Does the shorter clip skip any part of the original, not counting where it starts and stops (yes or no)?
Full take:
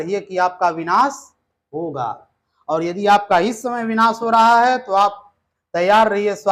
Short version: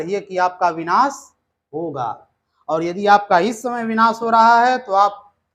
no